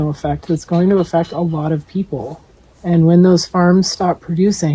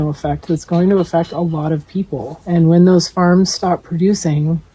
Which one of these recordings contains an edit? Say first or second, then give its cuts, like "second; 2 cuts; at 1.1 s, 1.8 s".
second; 1 cut; at 2.3 s